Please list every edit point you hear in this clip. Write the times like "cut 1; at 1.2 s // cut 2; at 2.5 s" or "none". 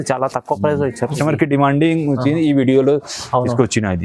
cut 1; at 1.1 s